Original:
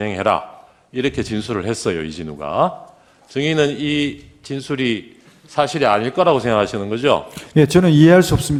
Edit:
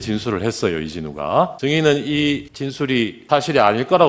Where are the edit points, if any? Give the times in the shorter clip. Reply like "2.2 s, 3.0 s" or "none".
1.5 s, 2.8 s